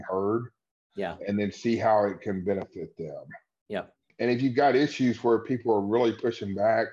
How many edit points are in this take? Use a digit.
1